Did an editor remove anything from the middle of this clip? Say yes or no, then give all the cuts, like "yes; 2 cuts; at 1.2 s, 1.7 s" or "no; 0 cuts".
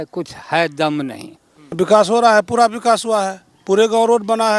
yes; 1 cut; at 1.8 s